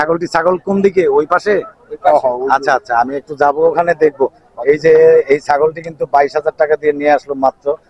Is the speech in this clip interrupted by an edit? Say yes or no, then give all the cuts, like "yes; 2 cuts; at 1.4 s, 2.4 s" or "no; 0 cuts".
no; 0 cuts